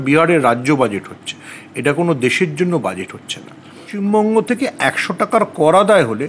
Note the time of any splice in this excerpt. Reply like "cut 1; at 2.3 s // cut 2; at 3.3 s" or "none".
cut 1; at 3.9 s